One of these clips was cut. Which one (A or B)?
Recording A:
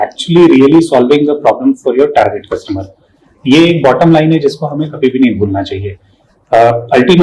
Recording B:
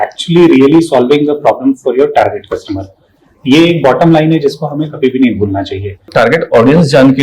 B